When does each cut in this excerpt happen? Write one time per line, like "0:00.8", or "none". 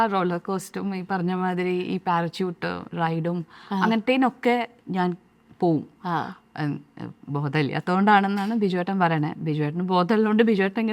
none